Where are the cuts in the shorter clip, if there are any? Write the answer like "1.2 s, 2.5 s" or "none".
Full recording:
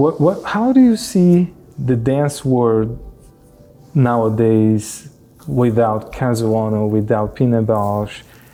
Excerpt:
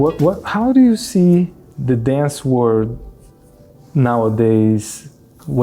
none